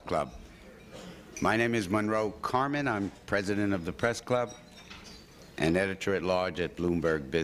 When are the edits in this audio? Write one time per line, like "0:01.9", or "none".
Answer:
none